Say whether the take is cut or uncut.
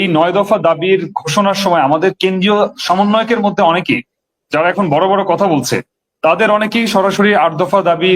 uncut